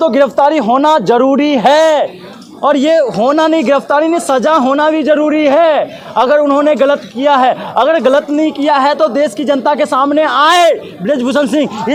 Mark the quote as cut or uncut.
uncut